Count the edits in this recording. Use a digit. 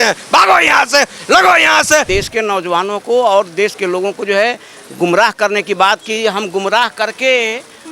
1